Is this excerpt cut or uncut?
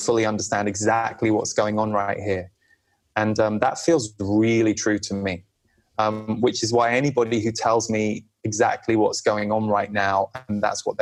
uncut